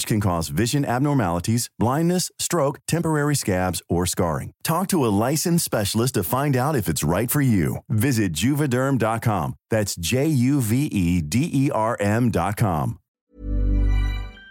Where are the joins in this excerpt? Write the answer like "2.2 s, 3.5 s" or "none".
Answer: 13.0 s